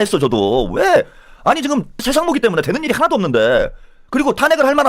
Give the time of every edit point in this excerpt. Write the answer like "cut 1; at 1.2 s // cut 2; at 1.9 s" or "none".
cut 1; at 2.0 s